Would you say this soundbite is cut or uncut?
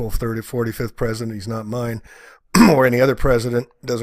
cut